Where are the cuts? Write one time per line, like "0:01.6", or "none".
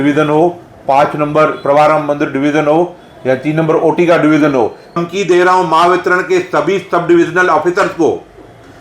0:05.0